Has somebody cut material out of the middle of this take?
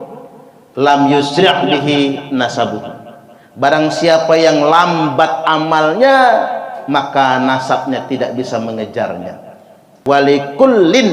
yes; 1 cut; at 9.9 s

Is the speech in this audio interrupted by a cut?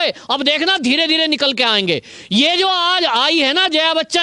no; 0 cuts

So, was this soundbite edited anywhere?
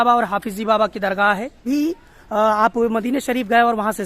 yes; 1 cut; at 1.6 s

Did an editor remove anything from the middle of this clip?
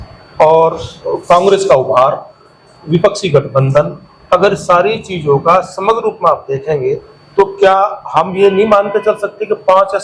no; 0 cuts

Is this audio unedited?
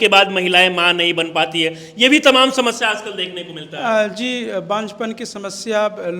yes; 0 cuts

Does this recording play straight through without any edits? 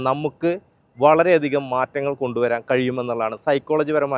yes; 0 cuts

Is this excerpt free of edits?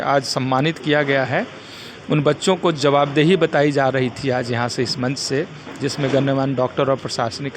yes; 0 cuts

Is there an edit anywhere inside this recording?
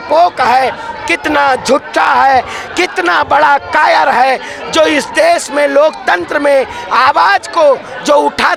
no; 0 cuts

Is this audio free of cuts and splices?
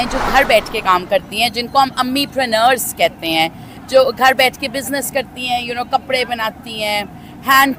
yes; 0 cuts

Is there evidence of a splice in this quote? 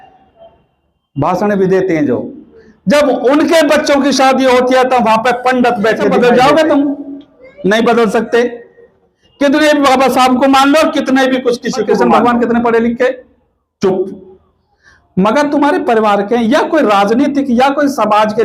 yes; 2 cuts; at 6.1 s, 12.0 s

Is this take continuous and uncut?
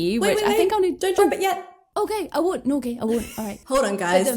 yes; 0 cuts

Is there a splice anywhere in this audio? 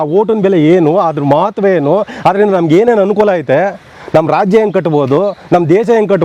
no; 0 cuts

